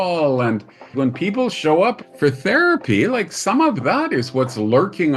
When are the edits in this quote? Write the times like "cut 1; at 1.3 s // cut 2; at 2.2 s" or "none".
cut 1; at 0.9 s // cut 2; at 2.1 s

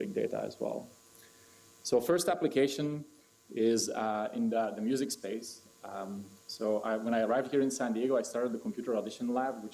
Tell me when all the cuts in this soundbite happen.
cut 1; at 4.7 s

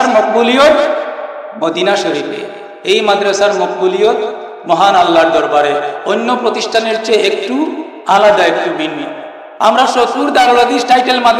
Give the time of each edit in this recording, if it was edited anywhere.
cut 1; at 9.4 s

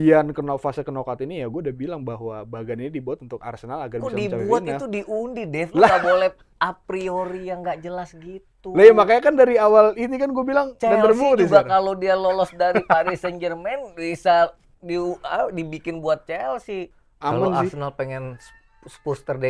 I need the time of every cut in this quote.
cut 1; at 17.0 s

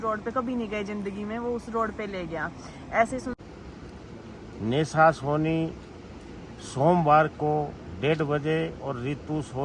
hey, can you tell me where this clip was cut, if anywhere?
cut 1; at 3.4 s

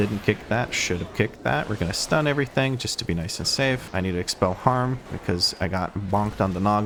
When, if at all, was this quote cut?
none

